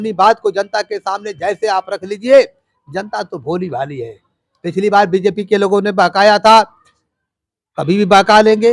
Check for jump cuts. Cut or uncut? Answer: uncut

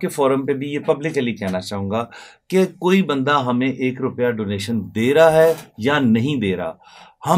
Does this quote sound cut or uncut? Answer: uncut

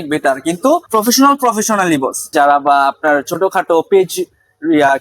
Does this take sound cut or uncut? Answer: cut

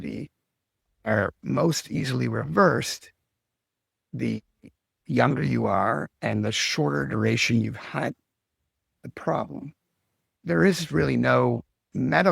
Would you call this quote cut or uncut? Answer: uncut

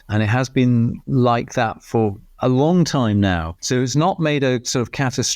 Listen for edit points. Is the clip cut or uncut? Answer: cut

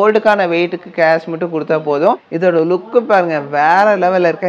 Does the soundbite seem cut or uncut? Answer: cut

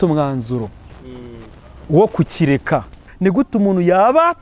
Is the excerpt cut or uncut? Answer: cut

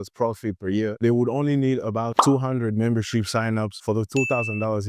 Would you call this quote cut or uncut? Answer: cut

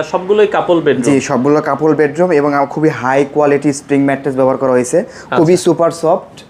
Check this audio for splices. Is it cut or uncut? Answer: uncut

